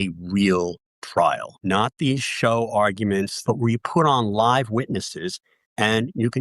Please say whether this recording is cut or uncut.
cut